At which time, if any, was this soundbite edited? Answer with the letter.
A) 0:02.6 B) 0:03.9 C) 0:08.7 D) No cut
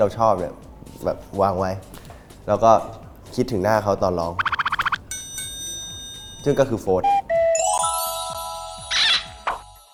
D